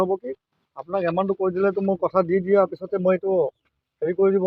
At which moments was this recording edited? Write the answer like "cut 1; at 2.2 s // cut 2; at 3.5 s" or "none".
none